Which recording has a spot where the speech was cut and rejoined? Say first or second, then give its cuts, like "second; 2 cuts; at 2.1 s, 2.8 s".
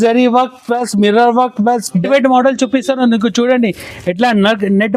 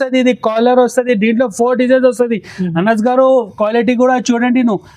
first; 1 cut; at 2.0 s